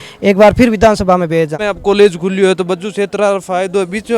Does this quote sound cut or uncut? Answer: cut